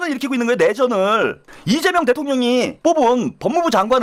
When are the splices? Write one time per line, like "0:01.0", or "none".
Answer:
none